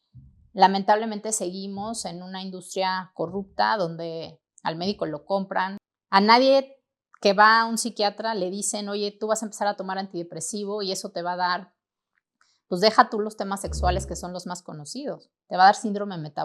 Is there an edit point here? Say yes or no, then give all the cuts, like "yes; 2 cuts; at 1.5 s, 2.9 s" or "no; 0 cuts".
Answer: yes; 1 cut; at 5.9 s